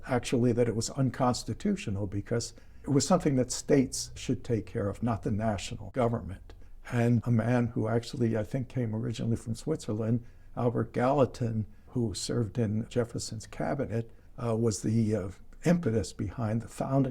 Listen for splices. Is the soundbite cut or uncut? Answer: cut